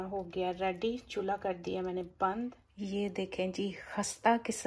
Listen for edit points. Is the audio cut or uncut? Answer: cut